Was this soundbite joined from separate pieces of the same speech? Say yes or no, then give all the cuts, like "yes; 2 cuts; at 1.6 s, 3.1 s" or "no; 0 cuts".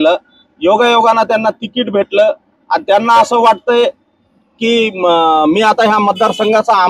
no; 0 cuts